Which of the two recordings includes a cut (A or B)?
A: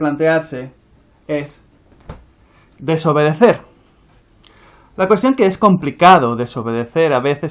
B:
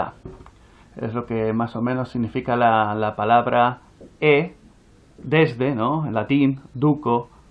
B